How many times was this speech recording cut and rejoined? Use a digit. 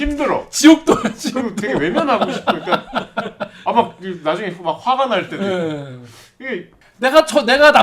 1